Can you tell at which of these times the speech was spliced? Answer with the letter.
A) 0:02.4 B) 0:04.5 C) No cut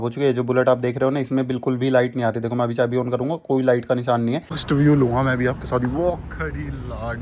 B